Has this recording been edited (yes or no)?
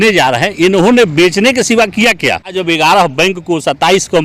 yes